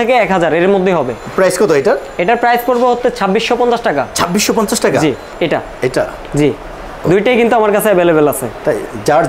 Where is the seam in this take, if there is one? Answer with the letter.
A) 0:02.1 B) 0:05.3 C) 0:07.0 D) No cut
B